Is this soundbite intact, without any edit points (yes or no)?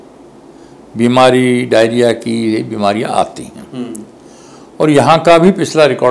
yes